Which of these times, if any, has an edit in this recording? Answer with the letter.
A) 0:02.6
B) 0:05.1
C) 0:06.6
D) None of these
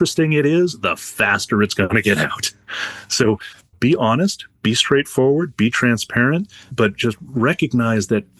D